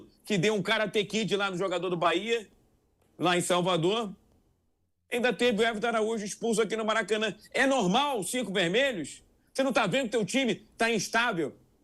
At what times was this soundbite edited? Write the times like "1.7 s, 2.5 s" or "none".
none